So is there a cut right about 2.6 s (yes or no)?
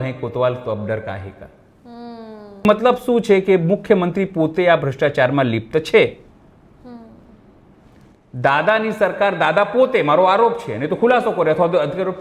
yes